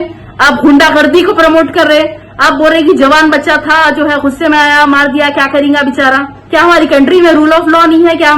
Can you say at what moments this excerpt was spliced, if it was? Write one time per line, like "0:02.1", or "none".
0:06.3

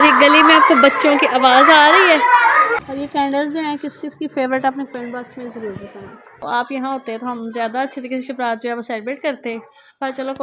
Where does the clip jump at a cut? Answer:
0:02.8
0:06.4

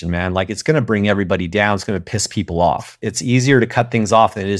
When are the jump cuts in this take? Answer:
0:03.0

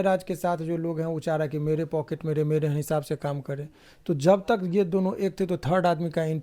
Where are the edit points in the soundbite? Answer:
none

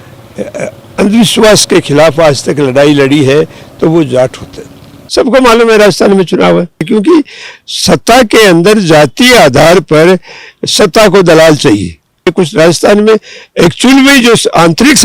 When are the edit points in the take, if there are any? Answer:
0:05.0
0:06.9
0:12.3

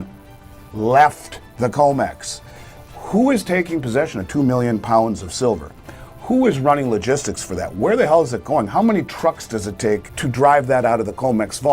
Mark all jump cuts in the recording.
0:10.1

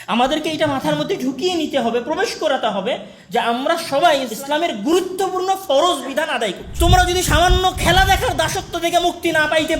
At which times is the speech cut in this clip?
0:04.3
0:06.6

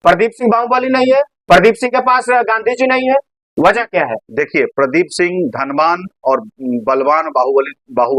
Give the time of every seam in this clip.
none

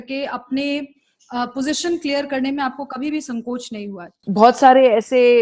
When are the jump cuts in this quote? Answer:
0:04.1

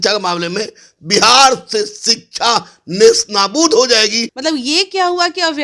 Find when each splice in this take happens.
0:04.3

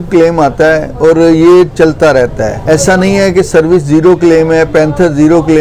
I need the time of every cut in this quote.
0:02.6

